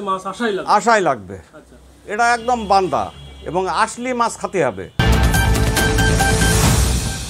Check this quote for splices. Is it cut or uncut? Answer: cut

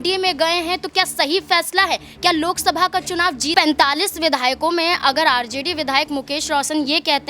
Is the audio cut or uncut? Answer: cut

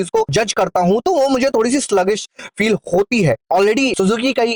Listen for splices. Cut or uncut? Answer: cut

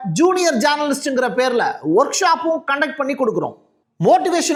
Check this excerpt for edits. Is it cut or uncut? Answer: uncut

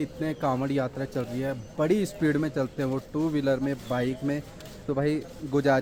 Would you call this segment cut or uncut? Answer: uncut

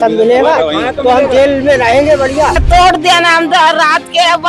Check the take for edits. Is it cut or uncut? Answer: cut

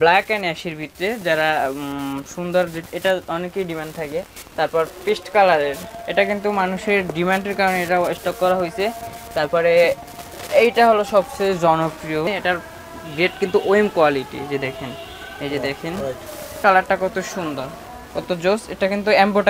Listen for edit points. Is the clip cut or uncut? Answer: cut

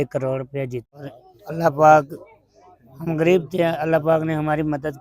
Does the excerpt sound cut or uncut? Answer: cut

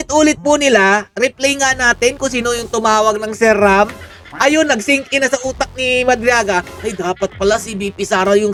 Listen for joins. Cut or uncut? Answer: uncut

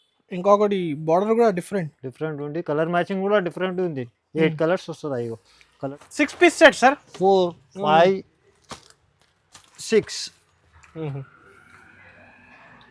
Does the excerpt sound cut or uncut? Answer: cut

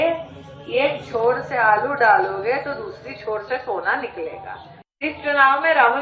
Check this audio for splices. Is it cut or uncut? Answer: cut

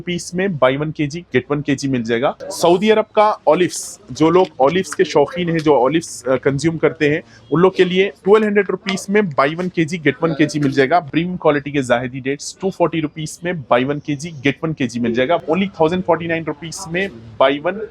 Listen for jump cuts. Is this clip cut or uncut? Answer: cut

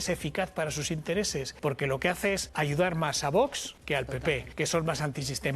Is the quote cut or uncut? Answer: cut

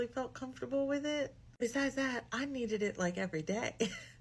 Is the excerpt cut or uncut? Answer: uncut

